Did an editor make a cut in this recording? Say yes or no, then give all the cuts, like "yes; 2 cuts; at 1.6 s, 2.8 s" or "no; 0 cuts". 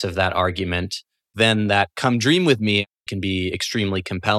yes; 2 cuts; at 1.3 s, 3.1 s